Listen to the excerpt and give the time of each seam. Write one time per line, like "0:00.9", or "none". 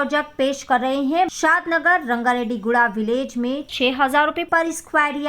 0:01.3